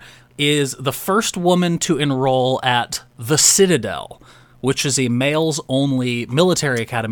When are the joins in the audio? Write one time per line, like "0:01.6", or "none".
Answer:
none